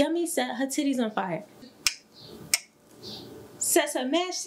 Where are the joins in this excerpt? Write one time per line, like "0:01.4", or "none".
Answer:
0:01.7